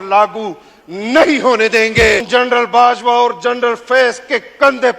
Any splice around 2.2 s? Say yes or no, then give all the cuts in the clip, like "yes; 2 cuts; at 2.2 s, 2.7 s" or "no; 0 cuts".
yes; 1 cut; at 2.2 s